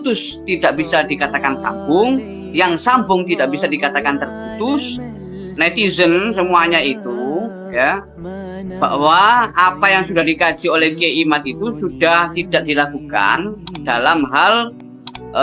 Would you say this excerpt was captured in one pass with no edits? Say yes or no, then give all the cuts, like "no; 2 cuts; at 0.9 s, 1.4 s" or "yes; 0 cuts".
no; 1 cut; at 5.3 s